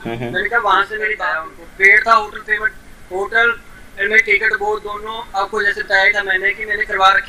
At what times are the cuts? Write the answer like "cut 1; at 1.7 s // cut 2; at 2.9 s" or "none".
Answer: cut 1; at 1.2 s